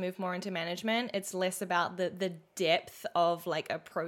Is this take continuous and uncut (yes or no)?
yes